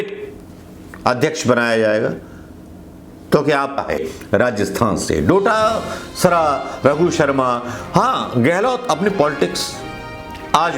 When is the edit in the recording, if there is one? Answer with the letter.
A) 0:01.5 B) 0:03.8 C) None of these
B